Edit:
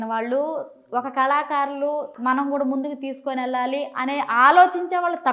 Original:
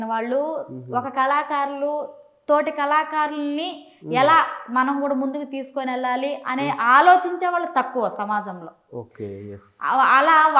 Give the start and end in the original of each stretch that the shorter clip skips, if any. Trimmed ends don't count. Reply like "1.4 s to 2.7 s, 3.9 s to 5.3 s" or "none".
2.1 s to 4.6 s